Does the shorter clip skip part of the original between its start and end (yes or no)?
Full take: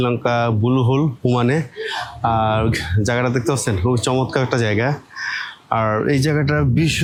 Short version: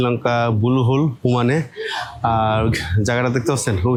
no